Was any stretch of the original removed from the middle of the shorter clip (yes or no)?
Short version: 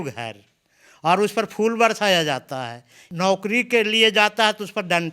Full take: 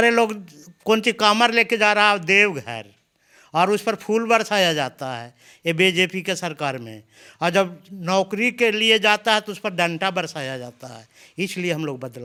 yes